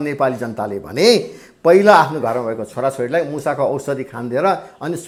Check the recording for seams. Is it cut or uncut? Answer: uncut